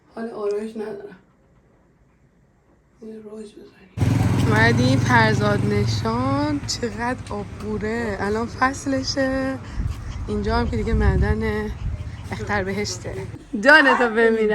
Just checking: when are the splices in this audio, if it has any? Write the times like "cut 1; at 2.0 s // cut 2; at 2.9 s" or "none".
cut 1; at 13.4 s